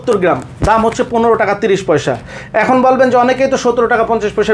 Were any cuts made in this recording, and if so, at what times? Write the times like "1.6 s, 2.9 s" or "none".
none